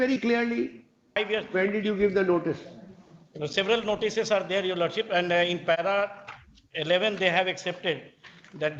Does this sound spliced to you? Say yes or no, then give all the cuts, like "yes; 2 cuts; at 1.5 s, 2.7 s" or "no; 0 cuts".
yes; 1 cut; at 1.2 s